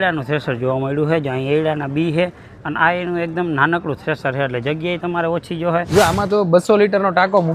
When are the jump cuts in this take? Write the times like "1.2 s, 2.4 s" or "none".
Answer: 5.9 s